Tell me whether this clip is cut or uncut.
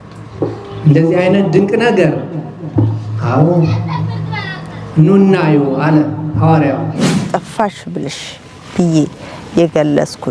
cut